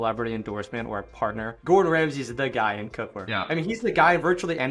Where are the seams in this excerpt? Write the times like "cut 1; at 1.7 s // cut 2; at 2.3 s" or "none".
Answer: none